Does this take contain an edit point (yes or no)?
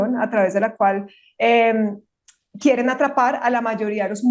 no